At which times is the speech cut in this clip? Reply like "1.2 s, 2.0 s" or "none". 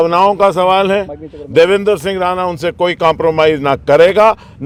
none